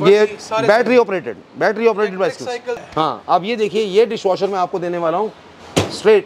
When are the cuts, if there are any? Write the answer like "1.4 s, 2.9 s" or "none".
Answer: 2.8 s